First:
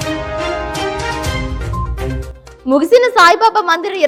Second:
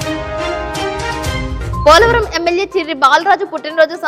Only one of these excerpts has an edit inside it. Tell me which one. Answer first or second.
second